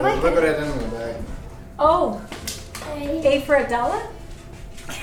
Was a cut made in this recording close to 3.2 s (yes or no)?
no